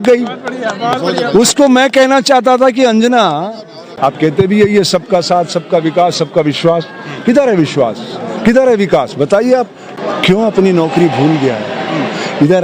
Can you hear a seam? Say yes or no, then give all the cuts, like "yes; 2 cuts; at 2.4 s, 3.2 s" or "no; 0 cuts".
yes; 2 cuts; at 3.9 s, 9.8 s